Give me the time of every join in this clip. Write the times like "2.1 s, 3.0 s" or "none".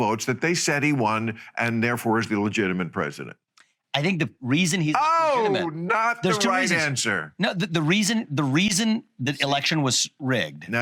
none